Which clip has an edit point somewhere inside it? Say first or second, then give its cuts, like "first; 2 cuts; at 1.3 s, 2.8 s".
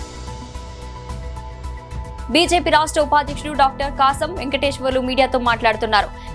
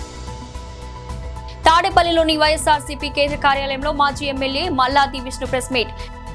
first; 2 cuts; at 1.2 s, 2.3 s